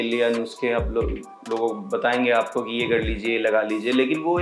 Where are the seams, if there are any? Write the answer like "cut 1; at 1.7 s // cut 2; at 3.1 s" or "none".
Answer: none